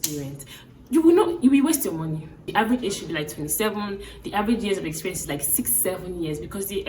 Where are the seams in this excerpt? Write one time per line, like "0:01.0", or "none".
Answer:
0:02.5